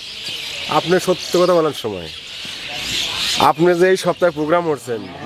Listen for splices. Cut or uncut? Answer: cut